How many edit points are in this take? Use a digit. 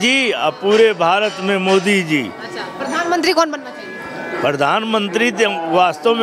0